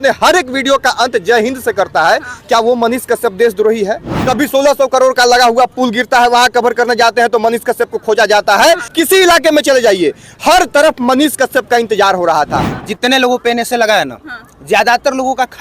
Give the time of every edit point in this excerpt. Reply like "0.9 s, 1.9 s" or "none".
4.1 s, 8.9 s, 12.7 s